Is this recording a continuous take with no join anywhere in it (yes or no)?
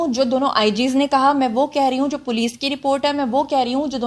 yes